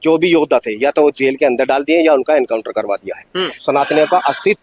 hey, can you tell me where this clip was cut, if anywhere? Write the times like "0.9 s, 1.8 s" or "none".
3.6 s